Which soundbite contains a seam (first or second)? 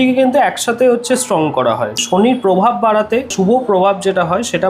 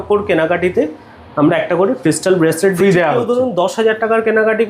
first